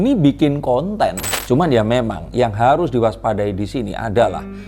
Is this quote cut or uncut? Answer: cut